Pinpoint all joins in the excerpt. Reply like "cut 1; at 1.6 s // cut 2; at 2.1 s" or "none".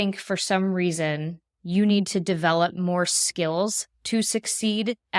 none